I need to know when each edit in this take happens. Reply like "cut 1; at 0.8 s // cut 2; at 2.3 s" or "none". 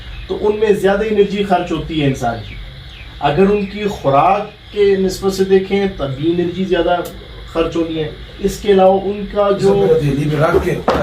cut 1; at 9.9 s